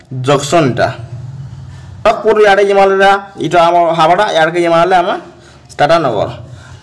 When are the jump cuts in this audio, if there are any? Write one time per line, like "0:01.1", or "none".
0:02.1